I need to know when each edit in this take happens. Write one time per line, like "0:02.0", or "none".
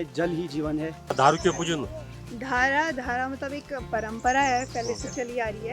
0:01.1